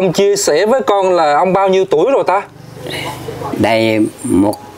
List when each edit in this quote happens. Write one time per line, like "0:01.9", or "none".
0:03.5